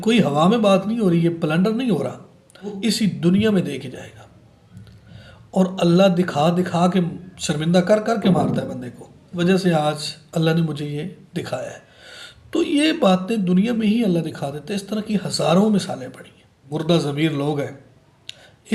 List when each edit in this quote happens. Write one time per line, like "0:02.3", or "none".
0:02.8
0:09.3
0:16.6